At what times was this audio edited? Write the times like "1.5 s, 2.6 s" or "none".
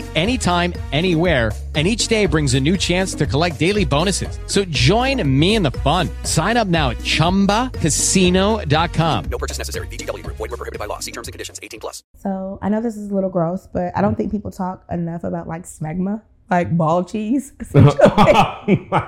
12.1 s